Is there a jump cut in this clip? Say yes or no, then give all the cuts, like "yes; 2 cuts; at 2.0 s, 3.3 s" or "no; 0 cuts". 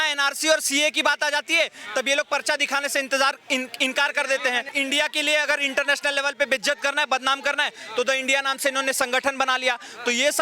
yes; 1 cut; at 4.7 s